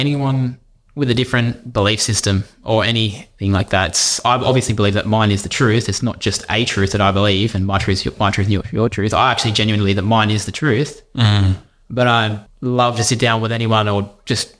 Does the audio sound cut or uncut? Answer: cut